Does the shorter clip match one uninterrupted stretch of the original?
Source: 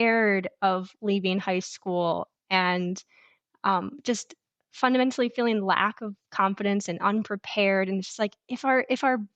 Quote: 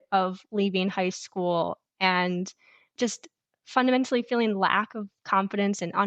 no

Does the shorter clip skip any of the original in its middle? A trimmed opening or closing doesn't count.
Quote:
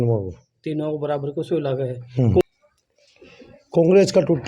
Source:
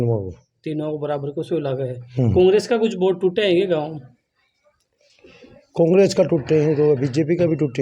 yes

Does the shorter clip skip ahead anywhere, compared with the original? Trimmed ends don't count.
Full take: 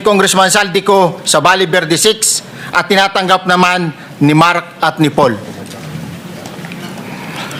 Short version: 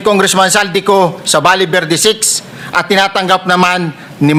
no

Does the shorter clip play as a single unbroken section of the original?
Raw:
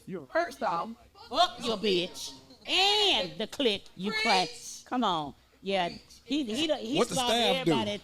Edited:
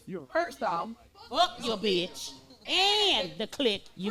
yes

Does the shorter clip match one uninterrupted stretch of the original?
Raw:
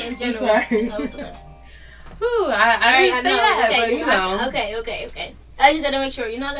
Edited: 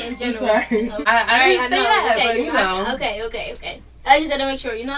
no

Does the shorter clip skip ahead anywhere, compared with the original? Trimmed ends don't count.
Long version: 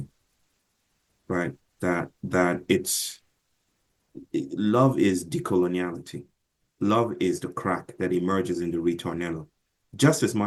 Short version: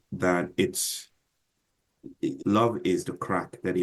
yes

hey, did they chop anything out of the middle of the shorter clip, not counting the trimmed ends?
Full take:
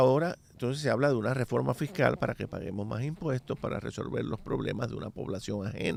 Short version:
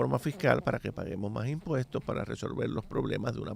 no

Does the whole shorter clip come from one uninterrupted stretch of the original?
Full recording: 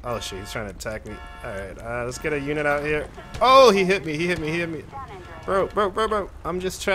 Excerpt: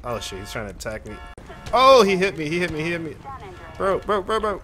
no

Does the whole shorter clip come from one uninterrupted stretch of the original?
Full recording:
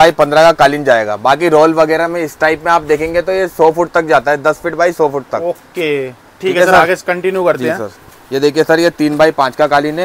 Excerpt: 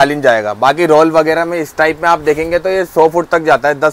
yes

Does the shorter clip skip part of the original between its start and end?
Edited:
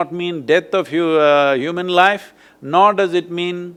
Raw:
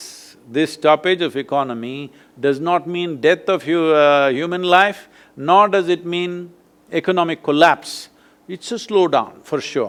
no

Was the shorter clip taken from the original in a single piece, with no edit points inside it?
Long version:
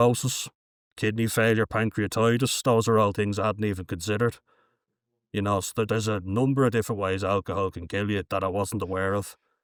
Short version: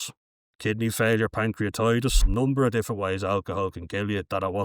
no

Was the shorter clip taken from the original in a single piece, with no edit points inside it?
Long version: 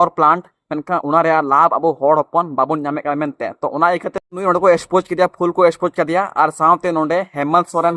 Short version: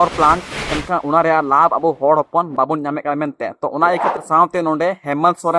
no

